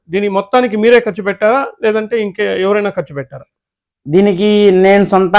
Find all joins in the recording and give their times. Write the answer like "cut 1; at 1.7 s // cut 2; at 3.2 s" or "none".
none